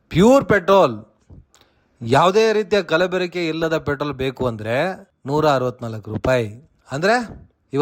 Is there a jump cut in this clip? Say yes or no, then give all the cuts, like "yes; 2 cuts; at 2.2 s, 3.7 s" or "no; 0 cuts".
no; 0 cuts